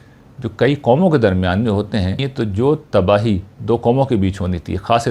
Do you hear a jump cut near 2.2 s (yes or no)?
yes